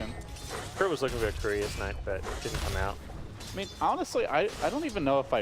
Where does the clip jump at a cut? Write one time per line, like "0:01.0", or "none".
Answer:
0:02.2